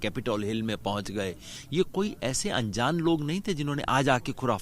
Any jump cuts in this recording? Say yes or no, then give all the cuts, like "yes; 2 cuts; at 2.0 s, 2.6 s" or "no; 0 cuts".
yes; 1 cut; at 1.5 s